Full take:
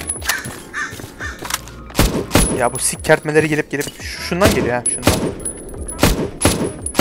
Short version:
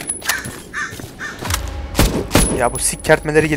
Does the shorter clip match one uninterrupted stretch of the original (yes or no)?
yes